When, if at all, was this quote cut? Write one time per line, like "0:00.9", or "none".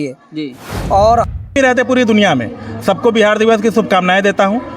0:01.3